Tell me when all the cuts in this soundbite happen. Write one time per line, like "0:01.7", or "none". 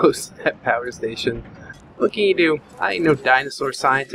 0:01.2
0:02.7